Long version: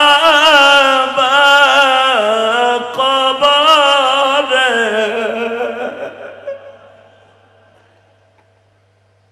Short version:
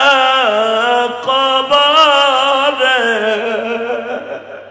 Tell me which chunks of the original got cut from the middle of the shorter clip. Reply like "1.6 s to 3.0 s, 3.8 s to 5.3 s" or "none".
none